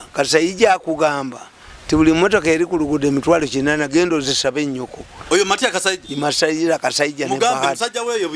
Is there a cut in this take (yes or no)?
no